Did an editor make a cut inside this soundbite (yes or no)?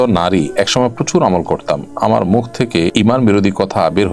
yes